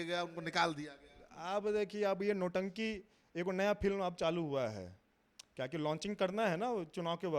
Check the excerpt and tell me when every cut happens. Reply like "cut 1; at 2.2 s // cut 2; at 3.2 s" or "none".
none